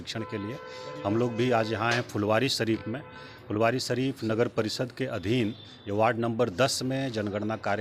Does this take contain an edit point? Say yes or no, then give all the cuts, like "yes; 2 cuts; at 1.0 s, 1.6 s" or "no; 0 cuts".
no; 0 cuts